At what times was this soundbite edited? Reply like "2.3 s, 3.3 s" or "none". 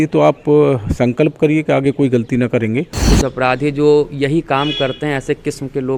3.1 s